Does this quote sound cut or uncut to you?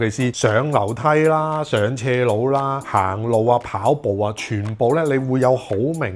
uncut